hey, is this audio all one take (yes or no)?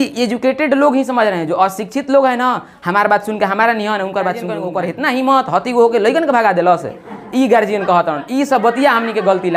no